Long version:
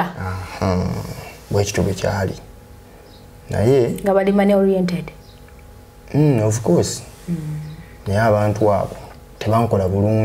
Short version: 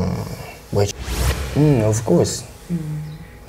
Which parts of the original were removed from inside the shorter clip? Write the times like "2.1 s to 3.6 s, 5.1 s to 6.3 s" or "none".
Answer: 1.7 s to 5.5 s